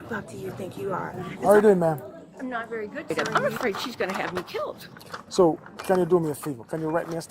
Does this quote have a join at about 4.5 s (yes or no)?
no